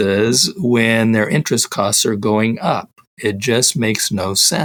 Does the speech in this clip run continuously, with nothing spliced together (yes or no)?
yes